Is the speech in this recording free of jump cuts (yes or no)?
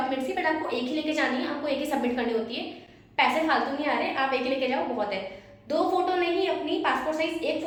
yes